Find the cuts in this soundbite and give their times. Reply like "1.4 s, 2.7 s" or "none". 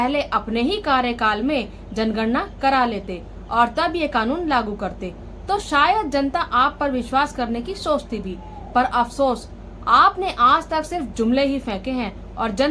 none